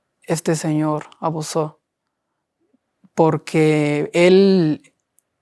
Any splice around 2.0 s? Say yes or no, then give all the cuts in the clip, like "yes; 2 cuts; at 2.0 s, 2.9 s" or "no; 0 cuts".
no; 0 cuts